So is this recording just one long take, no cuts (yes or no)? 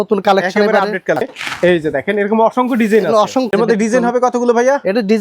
no